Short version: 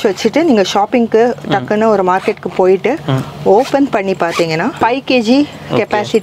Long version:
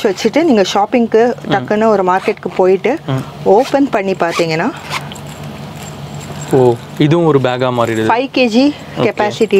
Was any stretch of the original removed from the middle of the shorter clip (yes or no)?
yes